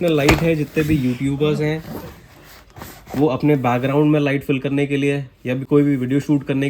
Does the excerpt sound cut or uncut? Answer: uncut